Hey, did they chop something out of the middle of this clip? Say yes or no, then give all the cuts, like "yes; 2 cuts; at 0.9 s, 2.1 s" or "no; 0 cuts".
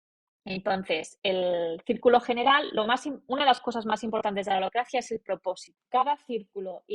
yes; 1 cut; at 5.7 s